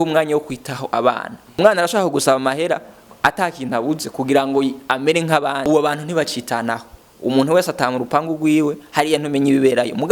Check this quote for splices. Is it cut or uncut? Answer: cut